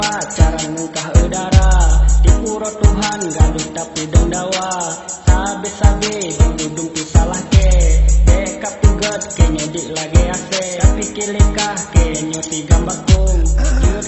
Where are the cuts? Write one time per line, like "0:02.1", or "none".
0:10.7